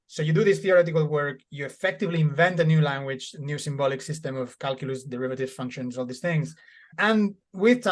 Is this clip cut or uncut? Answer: uncut